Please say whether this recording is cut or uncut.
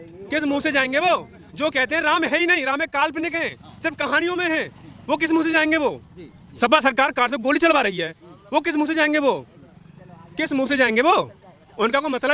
uncut